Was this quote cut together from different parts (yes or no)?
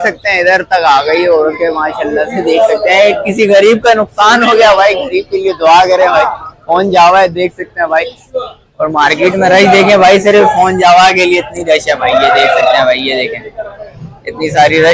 no